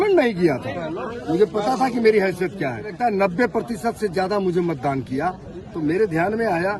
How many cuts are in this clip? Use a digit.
1